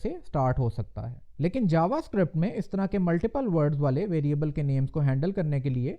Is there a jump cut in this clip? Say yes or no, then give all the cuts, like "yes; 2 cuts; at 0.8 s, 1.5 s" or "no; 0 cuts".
yes; 1 cut; at 1.3 s